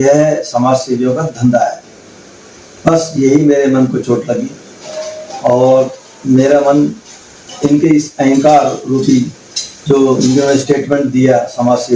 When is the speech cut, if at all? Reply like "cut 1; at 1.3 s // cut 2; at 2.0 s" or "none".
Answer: none